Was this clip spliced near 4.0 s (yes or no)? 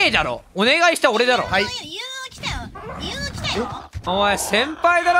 yes